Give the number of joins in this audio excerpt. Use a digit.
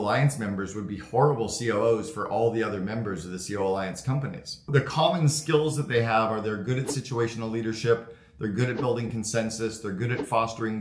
1